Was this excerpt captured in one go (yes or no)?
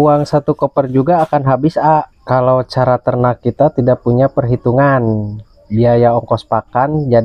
no